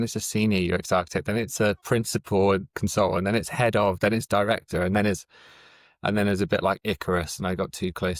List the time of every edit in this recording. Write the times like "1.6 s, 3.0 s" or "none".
none